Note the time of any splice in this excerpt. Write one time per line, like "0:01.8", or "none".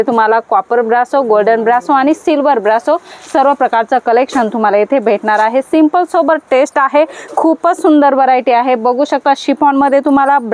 none